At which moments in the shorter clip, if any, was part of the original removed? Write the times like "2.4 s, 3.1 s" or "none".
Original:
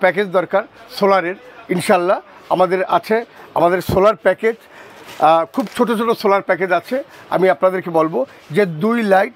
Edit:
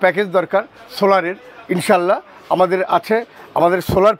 none